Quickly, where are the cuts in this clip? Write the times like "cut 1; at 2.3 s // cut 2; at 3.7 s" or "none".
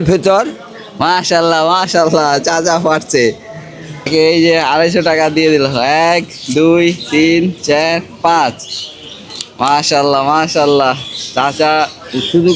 cut 1; at 4.1 s